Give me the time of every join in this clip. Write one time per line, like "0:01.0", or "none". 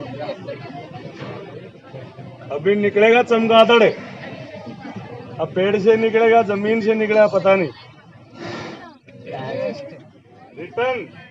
0:08.8